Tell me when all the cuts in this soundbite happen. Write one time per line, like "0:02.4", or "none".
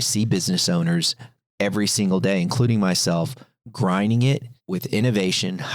0:04.5